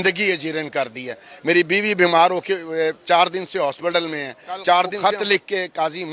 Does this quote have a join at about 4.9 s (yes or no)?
yes